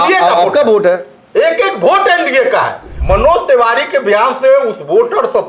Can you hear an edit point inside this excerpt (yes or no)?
yes